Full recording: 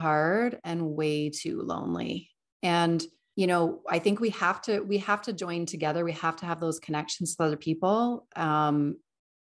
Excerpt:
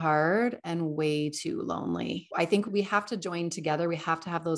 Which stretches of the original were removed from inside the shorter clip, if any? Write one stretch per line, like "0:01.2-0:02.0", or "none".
0:02.6-0:04.8